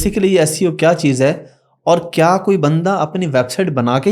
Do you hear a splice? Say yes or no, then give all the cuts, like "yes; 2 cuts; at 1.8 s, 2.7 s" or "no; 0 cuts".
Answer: no; 0 cuts